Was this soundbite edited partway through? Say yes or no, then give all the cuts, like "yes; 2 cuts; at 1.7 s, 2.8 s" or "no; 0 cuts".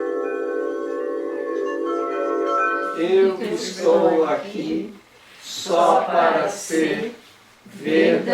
yes; 1 cut; at 2.8 s